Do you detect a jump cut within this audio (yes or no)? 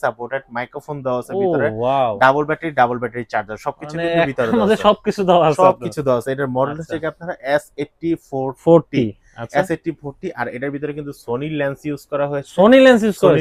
no